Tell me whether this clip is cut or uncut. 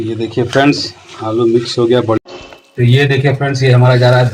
cut